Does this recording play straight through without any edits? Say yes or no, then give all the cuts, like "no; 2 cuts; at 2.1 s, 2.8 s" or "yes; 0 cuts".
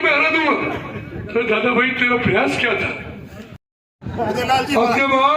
no; 1 cut; at 3.6 s